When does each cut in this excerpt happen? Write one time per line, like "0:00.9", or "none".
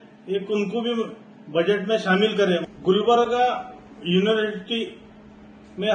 0:02.6

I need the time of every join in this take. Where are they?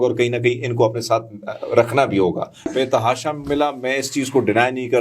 0:02.7

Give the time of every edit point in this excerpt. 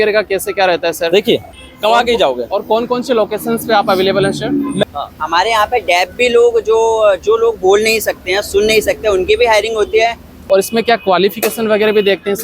0:01.6
0:04.8
0:10.5

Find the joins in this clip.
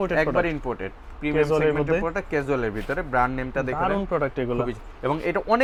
none

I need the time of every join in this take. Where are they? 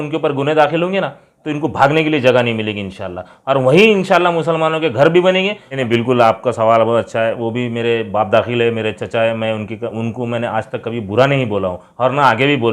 0:05.7

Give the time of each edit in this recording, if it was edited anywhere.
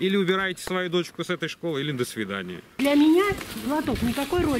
0:02.8

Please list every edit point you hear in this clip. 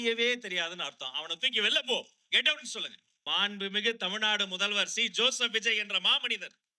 0:03.1

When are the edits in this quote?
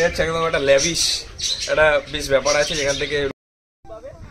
0:03.3

